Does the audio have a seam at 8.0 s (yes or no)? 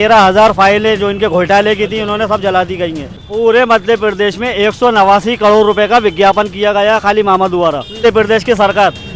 yes